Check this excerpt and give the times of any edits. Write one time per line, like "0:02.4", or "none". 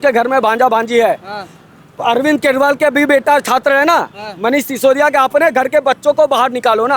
none